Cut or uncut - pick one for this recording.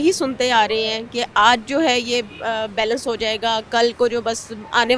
uncut